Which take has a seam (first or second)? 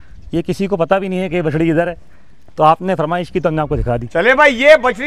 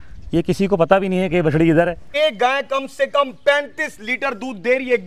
second